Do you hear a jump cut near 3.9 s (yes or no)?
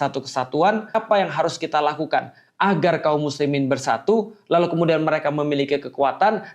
no